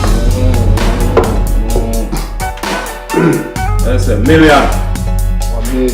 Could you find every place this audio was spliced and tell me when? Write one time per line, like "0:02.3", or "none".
0:03.2